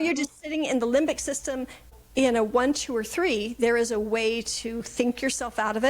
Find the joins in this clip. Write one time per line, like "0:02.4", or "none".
0:01.9